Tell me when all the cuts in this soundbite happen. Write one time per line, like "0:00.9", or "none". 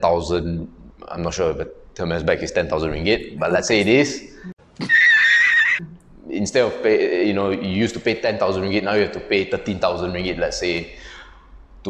none